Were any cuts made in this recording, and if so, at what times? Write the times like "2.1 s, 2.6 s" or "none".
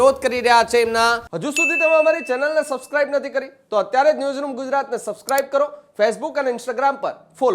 1.4 s